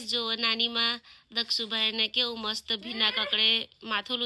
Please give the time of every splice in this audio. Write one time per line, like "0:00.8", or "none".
none